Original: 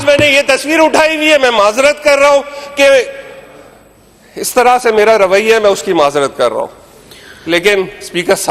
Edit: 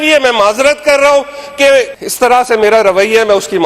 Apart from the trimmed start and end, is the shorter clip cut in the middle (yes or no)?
yes